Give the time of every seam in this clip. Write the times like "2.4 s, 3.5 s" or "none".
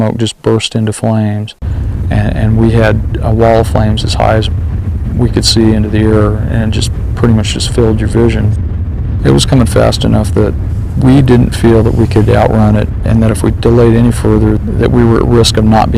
13.7 s